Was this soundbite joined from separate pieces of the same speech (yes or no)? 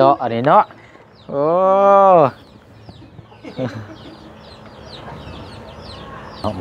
no